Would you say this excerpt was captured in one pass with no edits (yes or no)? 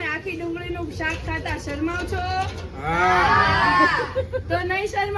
yes